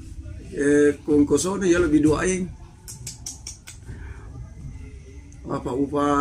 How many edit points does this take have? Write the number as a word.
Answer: zero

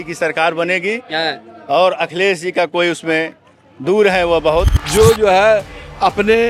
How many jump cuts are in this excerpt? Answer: one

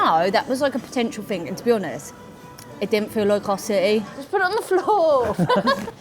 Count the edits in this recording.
one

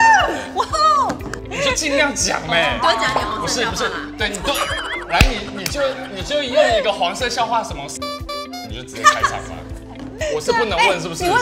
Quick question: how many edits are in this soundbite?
one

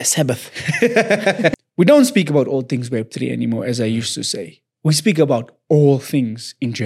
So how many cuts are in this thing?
one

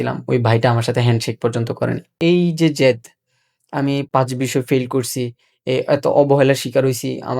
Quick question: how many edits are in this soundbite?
two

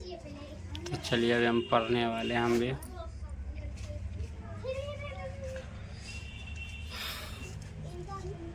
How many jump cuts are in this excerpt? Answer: zero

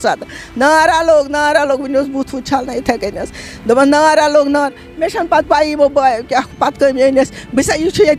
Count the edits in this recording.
zero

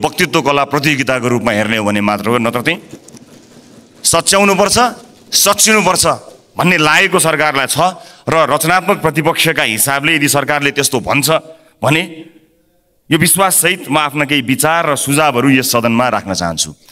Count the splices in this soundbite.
zero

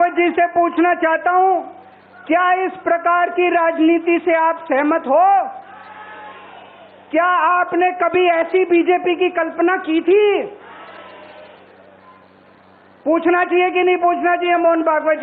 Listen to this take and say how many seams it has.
zero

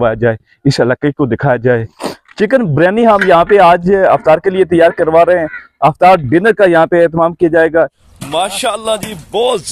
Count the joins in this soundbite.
two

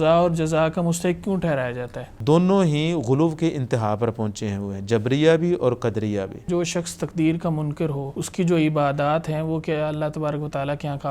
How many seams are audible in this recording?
three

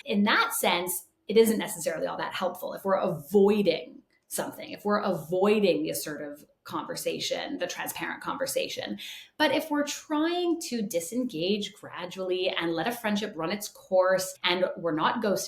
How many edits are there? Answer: one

